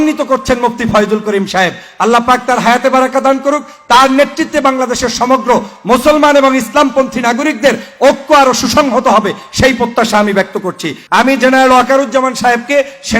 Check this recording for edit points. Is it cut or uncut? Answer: cut